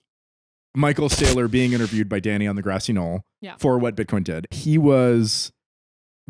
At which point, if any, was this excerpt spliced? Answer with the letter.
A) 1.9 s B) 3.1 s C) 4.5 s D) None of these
C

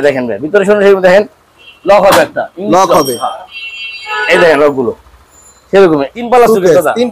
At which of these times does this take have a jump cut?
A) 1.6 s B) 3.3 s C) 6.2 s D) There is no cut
C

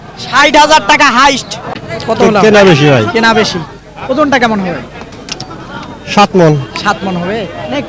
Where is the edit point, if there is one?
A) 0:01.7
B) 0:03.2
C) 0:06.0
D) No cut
A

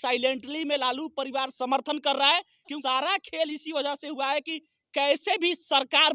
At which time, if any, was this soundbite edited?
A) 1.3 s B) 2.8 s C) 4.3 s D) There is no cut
B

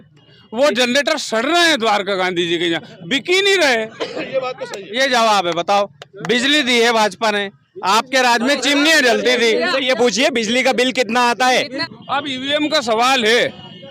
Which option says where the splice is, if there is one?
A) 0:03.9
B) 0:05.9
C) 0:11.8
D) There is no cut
C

